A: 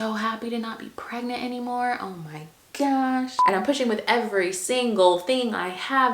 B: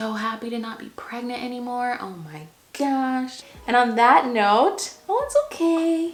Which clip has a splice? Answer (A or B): A